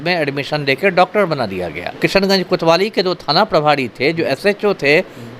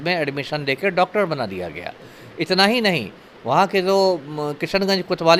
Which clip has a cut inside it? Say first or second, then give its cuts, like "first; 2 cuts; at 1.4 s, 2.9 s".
first; 1 cut; at 1.9 s